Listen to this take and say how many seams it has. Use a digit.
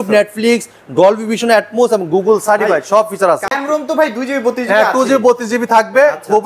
1